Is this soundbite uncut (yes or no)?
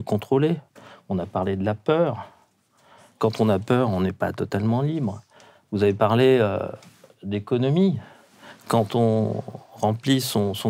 yes